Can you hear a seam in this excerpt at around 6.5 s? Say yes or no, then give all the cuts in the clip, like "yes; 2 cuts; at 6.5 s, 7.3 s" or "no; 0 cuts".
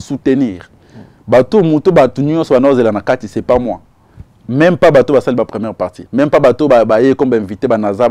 no; 0 cuts